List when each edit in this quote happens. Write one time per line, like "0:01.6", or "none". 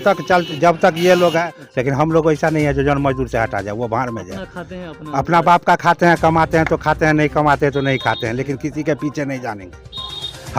0:01.5